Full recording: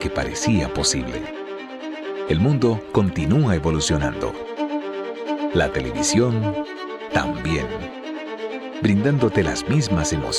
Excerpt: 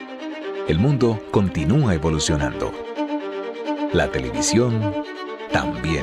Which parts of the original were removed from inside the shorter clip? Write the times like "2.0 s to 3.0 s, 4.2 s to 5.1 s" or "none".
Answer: none